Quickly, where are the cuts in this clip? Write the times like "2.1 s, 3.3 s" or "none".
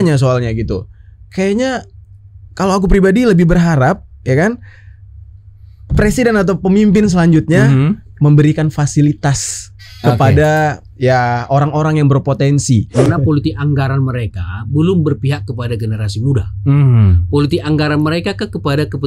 13.1 s